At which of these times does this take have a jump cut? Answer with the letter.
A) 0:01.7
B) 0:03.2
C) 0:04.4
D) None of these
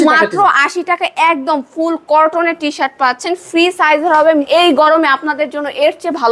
C